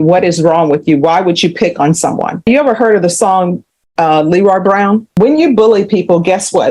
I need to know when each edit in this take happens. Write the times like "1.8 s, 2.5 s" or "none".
2.5 s, 5.1 s

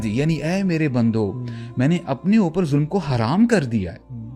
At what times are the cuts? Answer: none

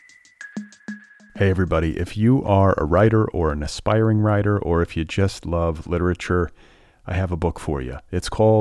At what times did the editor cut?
1.0 s

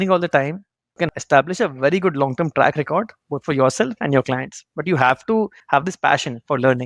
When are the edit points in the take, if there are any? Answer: 1.2 s, 5.6 s

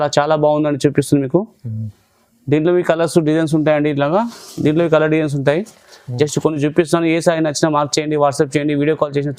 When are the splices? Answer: none

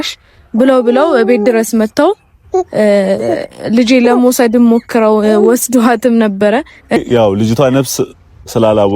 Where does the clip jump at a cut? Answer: 7.0 s

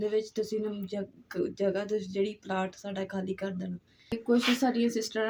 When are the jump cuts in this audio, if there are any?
4.2 s

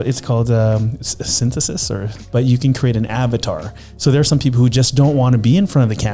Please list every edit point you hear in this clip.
2.2 s

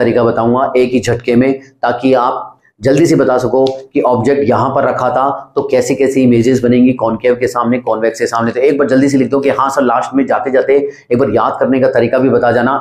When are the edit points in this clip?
none

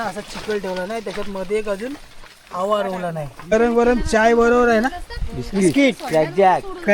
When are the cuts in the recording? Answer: 3.3 s

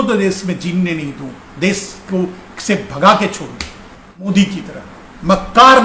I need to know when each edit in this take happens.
4.3 s

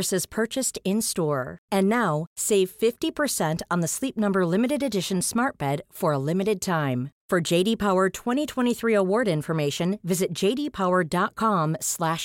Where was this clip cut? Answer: none

